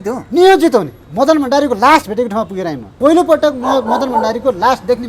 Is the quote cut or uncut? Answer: cut